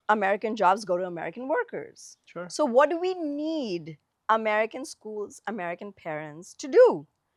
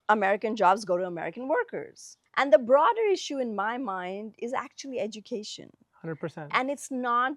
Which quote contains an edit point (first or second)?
second